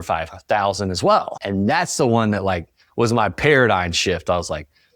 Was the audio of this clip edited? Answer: yes; 1 cut; at 1.4 s

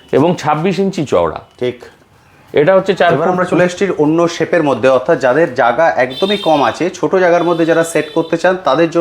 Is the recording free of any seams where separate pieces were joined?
no; 1 cut; at 3.3 s

